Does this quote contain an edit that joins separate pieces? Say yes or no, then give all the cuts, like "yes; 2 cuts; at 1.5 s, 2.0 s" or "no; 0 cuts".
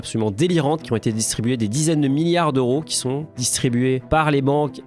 no; 0 cuts